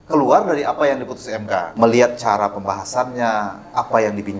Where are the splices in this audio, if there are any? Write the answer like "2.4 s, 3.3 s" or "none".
1.7 s